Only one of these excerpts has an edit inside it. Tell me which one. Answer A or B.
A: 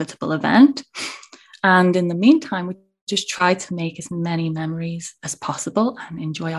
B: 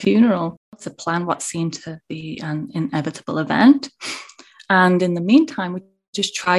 B